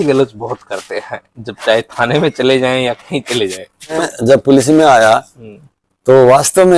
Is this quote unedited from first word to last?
no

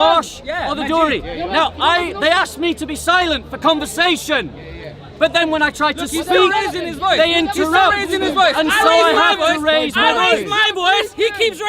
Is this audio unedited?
yes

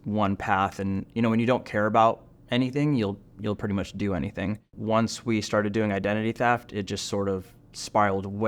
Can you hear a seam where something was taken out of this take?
yes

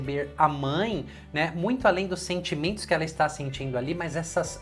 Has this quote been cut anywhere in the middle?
no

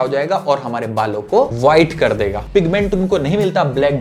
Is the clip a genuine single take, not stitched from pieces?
no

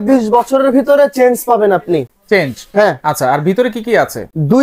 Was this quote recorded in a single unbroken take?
yes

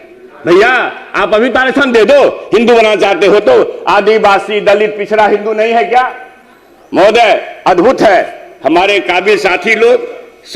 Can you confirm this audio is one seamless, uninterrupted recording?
yes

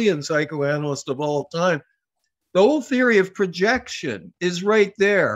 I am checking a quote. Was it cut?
no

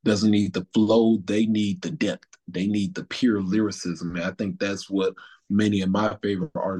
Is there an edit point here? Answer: no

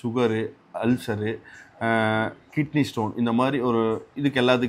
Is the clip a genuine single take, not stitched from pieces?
yes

